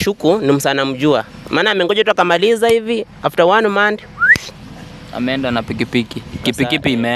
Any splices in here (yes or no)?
no